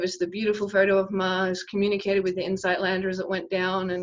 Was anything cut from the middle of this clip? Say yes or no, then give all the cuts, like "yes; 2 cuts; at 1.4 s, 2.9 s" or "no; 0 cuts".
no; 0 cuts